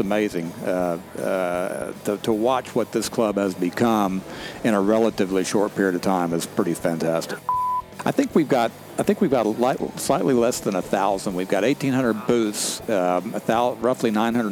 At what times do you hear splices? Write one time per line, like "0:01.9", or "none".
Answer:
0:07.5